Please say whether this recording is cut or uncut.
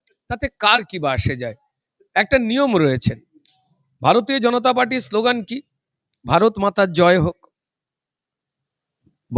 uncut